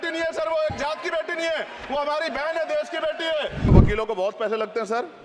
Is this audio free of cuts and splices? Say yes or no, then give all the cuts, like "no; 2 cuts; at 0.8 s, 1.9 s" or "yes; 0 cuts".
no; 1 cut; at 3.7 s